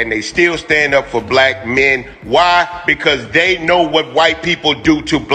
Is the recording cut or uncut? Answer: uncut